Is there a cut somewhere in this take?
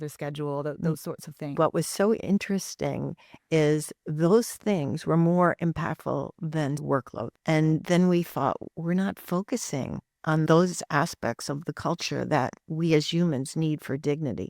yes; 1 cut; at 1.5 s

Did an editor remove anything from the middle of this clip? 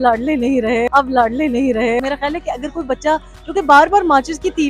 yes; 1 cut; at 2.0 s

